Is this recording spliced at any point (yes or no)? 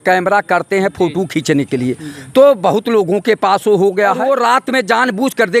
yes